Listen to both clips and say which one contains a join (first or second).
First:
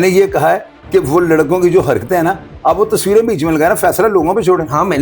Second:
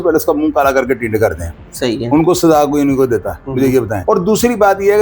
second